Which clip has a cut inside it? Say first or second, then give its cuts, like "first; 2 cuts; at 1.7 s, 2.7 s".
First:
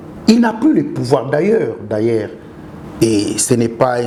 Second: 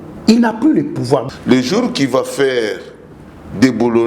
second; 1 cut; at 1.3 s